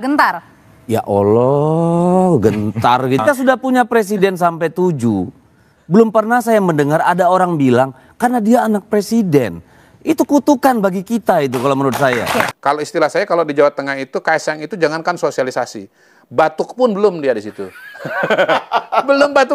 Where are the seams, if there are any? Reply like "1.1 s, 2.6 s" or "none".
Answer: 3.2 s, 12.5 s

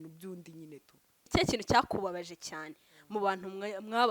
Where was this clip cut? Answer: 1.3 s

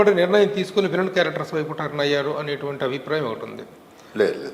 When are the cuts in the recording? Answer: none

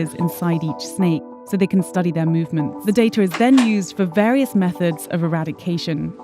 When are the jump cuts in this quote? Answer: 1.3 s, 2.8 s

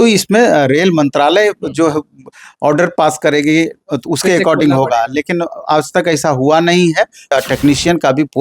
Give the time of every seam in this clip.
7.3 s

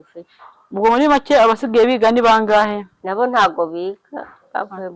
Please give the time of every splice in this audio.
2.9 s

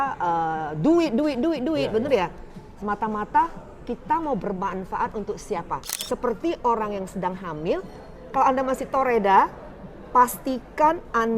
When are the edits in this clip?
5.9 s

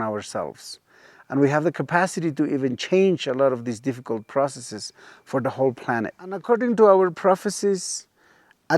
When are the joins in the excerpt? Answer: 6.4 s

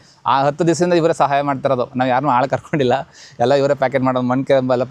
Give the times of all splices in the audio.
none

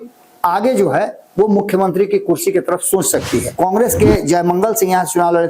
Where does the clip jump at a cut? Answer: 3.5 s

